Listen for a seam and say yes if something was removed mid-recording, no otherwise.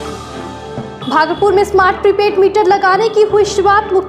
no